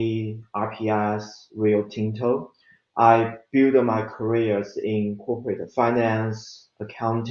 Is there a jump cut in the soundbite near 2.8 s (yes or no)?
yes